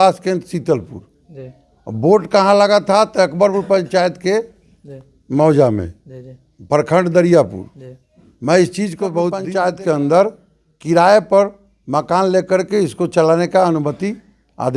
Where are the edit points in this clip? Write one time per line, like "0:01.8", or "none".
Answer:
0:09.4